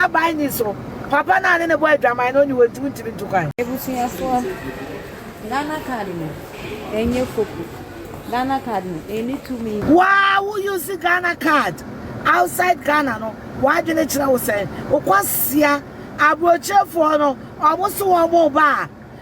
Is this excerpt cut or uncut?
cut